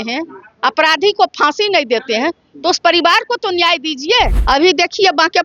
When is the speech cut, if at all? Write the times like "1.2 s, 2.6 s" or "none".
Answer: 4.4 s